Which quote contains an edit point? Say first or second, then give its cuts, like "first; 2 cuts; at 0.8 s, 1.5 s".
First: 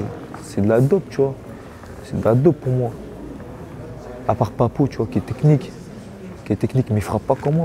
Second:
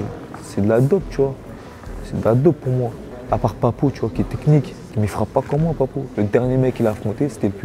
second; 3 cuts; at 3.1 s, 4.9 s, 6.0 s